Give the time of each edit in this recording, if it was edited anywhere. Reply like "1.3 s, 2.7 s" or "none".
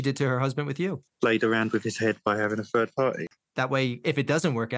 1.0 s, 3.4 s